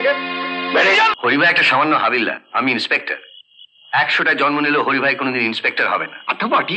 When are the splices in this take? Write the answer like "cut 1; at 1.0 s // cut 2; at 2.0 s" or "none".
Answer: cut 1; at 1.1 s